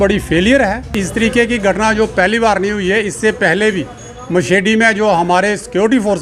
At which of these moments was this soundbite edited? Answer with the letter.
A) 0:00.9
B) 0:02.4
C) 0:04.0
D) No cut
A